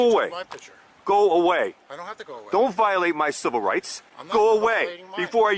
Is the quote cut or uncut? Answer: uncut